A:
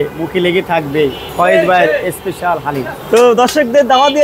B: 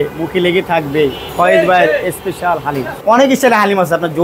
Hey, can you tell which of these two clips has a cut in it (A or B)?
B